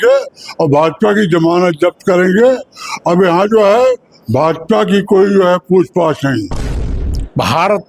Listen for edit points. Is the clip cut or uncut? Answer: cut